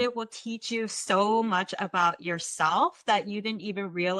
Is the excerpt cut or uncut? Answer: uncut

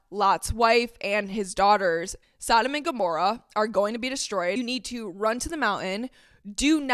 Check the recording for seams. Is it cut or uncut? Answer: cut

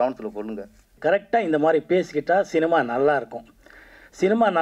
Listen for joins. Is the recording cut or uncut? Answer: cut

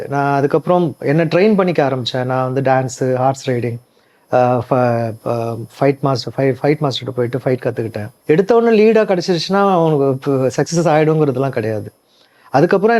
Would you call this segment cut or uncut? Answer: cut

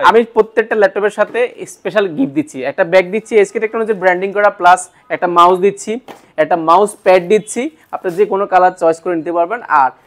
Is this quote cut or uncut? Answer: uncut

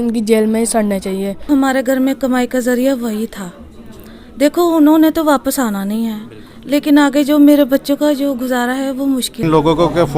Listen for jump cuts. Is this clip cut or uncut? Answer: cut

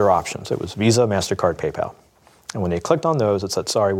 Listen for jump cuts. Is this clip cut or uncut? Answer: uncut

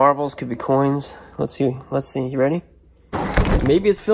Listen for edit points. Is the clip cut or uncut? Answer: cut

